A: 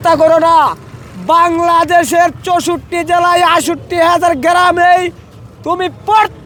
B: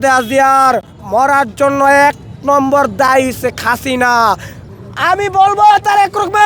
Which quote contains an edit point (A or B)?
B